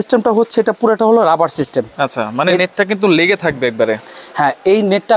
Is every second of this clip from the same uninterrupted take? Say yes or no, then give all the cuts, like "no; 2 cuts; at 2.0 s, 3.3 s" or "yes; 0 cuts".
yes; 0 cuts